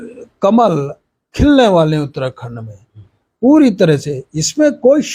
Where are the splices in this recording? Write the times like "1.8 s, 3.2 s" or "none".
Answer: none